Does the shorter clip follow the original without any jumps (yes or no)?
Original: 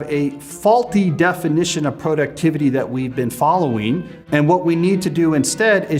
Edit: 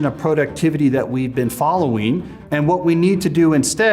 yes